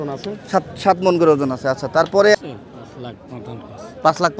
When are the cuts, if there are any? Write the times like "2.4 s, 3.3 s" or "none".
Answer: 2.4 s